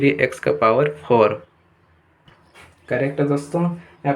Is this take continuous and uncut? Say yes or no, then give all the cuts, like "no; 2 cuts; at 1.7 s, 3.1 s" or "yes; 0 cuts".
yes; 0 cuts